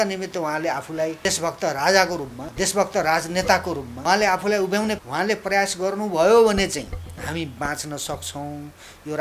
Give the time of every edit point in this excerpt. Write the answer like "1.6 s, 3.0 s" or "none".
1.2 s, 2.4 s, 3.9 s, 5.0 s, 7.0 s

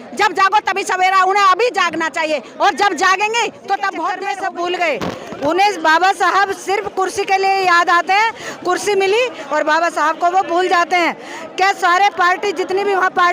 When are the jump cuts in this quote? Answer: 4.2 s

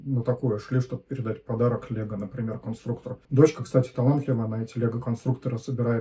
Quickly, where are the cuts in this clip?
3.1 s

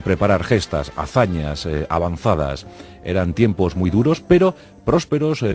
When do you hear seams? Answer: 0.9 s

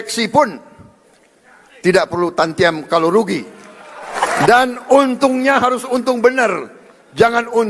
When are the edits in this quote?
4.1 s

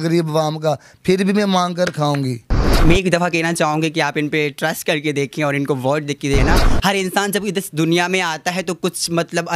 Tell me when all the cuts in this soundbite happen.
2.7 s, 6.4 s

